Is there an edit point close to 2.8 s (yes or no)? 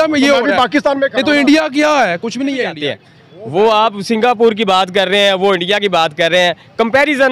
yes